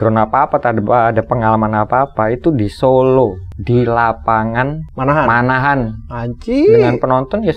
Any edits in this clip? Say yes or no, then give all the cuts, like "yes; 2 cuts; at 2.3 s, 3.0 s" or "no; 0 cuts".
yes; 2 cuts; at 3.5 s, 4.8 s